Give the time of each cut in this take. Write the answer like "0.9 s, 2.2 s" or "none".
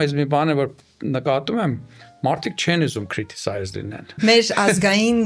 4.1 s